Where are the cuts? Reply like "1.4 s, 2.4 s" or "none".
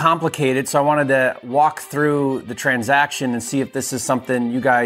none